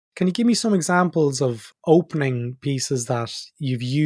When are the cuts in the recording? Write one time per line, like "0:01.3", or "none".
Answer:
0:01.7